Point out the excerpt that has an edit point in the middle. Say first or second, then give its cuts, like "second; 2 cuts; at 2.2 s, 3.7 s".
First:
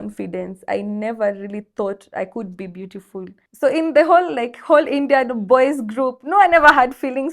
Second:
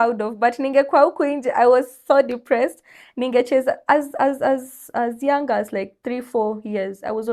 first; 1 cut; at 3.4 s